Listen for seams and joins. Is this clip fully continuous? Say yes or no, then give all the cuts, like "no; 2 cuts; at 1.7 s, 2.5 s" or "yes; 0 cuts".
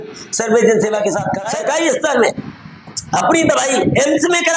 no; 1 cut; at 1.4 s